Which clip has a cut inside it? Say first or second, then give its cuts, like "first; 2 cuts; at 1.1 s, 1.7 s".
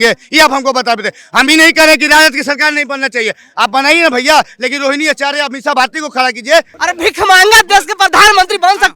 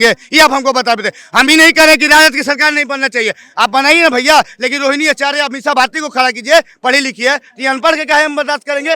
first; 1 cut; at 6.7 s